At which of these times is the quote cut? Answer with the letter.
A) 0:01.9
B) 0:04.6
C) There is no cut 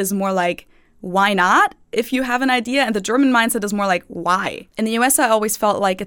B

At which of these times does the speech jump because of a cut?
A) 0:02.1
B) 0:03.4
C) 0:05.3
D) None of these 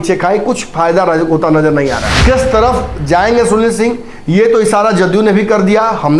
A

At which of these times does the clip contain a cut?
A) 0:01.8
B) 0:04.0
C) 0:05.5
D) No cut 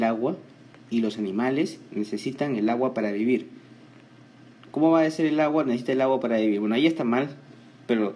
A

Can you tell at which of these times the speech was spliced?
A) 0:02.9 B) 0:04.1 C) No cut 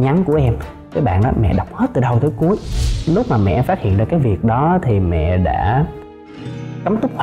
A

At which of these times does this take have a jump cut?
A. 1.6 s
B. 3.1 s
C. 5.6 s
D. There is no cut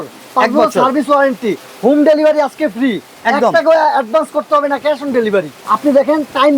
C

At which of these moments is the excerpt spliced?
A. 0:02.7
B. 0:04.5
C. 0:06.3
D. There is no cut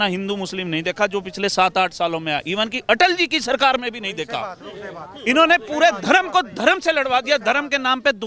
D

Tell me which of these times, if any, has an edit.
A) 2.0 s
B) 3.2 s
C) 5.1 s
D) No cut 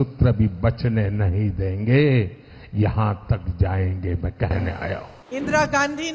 C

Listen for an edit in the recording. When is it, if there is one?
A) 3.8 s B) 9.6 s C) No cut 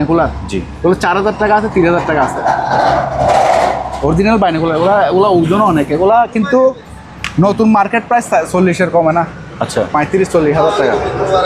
C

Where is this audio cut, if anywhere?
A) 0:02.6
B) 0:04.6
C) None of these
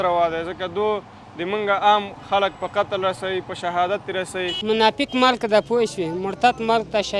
B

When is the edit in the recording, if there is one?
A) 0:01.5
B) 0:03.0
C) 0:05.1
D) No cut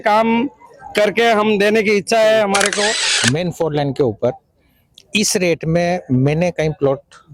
B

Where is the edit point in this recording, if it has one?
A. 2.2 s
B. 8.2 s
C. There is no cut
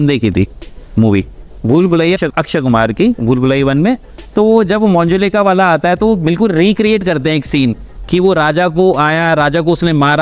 A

